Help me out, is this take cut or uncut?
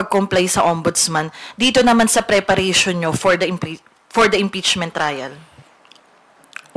uncut